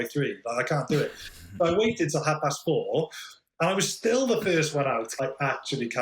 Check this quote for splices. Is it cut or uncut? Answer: cut